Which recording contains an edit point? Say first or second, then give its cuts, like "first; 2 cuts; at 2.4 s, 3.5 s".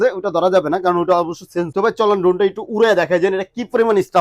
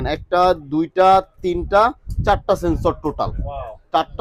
first; 1 cut; at 1.8 s